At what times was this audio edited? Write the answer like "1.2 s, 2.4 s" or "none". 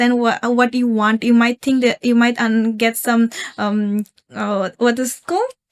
none